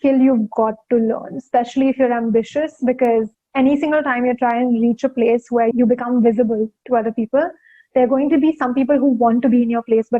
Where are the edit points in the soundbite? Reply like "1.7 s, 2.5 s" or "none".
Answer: 5.7 s